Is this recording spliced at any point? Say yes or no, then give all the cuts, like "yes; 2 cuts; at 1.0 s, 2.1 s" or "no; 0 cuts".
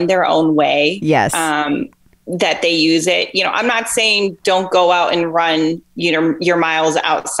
no; 0 cuts